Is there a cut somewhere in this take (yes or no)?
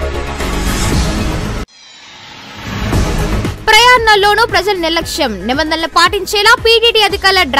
yes